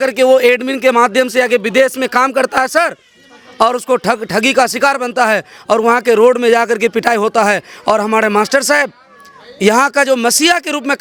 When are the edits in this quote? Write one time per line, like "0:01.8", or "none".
none